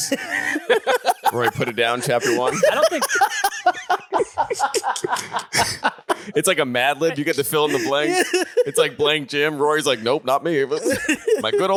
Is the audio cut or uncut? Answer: uncut